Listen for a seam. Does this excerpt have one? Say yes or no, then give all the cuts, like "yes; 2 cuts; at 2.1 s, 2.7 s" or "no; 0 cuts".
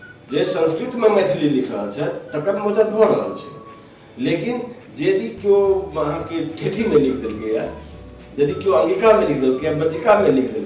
no; 0 cuts